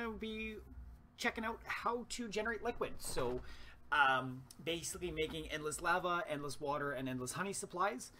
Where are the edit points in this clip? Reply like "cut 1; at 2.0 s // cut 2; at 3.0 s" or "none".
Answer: cut 1; at 2.9 s

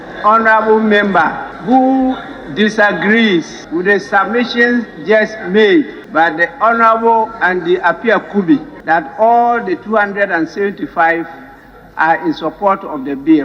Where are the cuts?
cut 1; at 1.5 s // cut 2; at 3.6 s // cut 3; at 6.0 s // cut 4; at 8.7 s

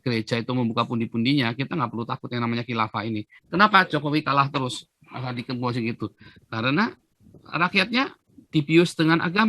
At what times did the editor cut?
cut 1; at 3.3 s

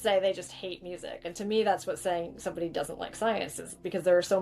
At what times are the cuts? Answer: cut 1; at 1.2 s

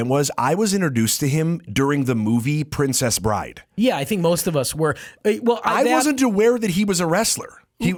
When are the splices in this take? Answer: none

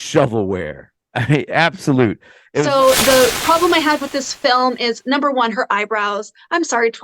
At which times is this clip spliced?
cut 1; at 2.6 s

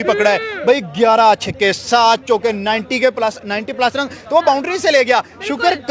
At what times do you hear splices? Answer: none

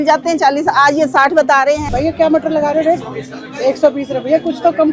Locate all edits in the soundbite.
cut 1; at 1.8 s

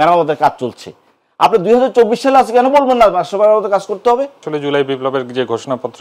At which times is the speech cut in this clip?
cut 1; at 4.5 s

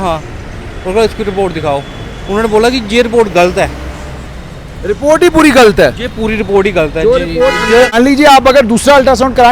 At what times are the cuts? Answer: cut 1; at 7.9 s

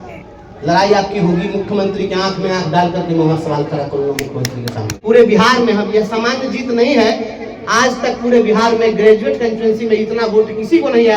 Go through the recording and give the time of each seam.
cut 1; at 5.0 s

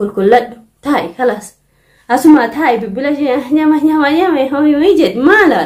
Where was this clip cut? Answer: none

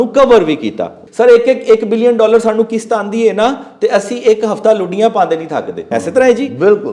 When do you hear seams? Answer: cut 1; at 1.0 s // cut 2; at 5.8 s

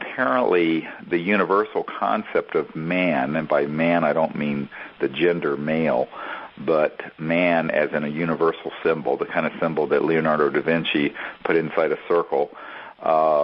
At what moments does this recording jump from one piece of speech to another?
cut 1; at 2.5 s

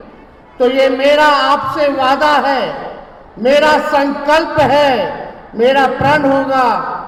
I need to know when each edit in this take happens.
none

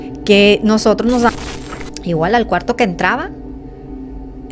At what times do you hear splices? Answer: cut 1; at 1.3 s

